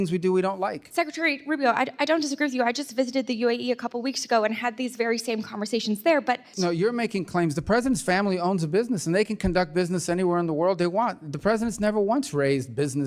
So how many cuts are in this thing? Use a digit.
1